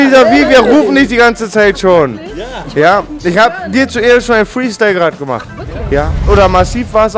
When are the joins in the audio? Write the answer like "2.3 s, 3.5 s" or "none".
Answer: 6.2 s

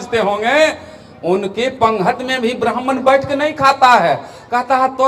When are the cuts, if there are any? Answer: none

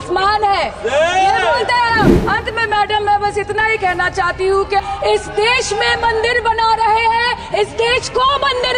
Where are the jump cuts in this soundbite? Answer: 2.2 s, 4.8 s

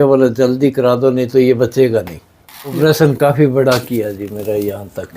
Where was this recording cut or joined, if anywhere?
2.7 s

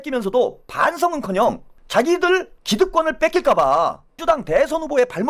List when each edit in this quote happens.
1.7 s, 4.1 s

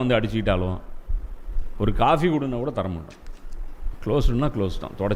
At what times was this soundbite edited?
none

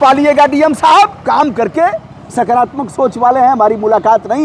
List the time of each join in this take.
none

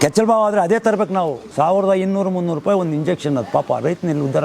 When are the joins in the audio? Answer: 1.4 s

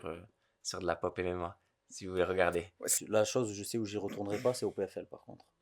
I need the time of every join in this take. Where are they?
2.9 s

